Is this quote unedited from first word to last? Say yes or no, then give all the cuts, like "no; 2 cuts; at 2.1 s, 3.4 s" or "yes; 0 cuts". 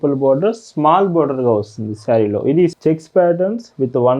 no; 1 cut; at 2.7 s